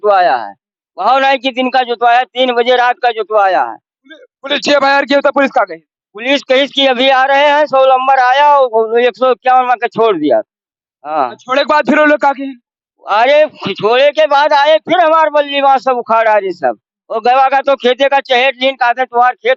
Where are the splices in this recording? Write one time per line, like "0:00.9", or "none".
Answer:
none